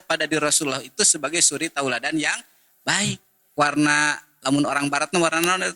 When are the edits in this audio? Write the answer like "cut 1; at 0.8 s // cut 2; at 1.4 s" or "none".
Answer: cut 1; at 3.5 s